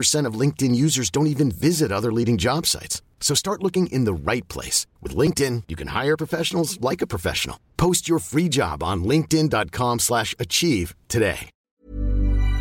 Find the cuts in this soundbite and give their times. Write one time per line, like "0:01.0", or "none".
0:11.5